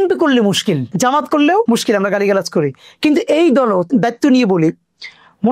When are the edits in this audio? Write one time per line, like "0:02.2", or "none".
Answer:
0:00.9
0:01.6
0:03.8